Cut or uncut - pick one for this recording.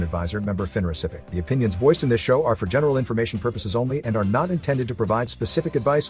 cut